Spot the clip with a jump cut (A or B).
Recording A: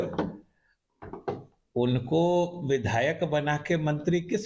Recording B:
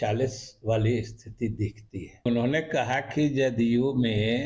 B